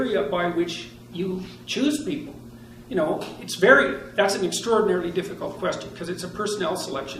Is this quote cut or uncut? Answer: cut